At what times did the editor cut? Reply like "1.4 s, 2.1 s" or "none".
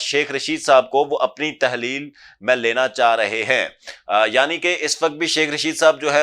none